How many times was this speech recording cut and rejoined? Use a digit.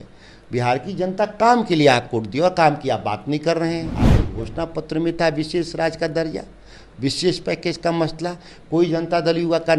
1